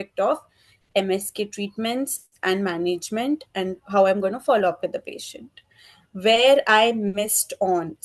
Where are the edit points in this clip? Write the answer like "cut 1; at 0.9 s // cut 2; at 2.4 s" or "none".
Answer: none